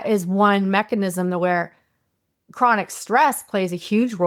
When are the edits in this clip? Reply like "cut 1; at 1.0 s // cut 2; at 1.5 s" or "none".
none